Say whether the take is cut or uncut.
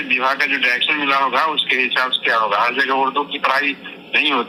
uncut